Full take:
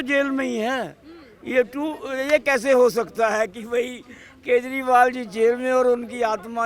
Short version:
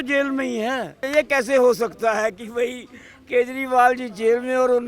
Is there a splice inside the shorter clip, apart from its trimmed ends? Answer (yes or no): yes